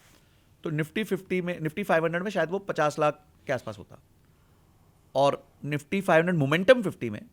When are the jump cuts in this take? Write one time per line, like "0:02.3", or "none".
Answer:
none